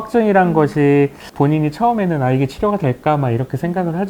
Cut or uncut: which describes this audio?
cut